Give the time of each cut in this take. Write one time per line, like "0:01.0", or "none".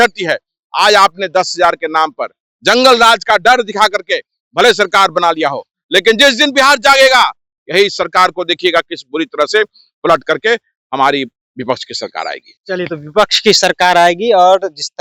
none